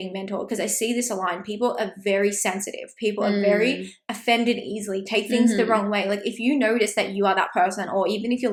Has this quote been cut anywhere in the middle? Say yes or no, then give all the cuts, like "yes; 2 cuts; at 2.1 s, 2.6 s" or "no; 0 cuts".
no; 0 cuts